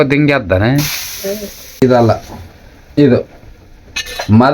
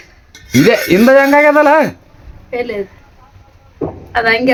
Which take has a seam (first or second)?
first